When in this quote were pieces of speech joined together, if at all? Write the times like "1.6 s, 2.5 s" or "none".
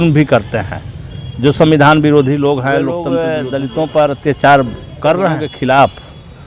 3.1 s, 5.5 s